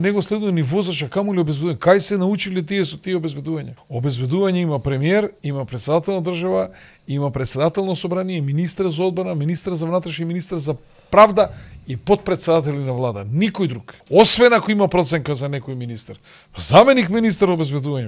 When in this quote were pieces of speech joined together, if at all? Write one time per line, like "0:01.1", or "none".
0:03.8
0:13.9